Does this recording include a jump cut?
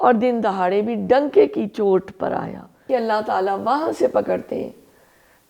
yes; 1 cut; at 2.9 s

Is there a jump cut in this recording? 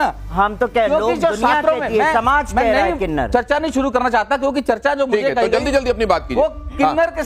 no; 0 cuts

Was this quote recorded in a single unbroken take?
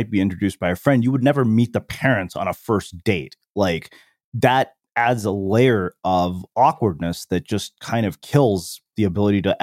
yes; 0 cuts

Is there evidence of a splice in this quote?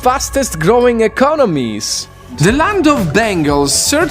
yes; 1 cut; at 2.2 s

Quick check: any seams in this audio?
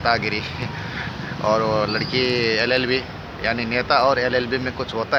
no; 0 cuts

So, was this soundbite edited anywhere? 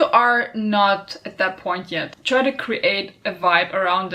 yes; 1 cut; at 2.2 s

